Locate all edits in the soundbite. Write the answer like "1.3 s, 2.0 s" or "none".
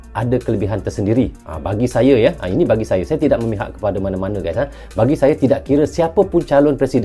none